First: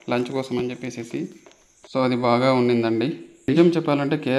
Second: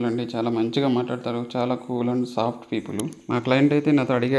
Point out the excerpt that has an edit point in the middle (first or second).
first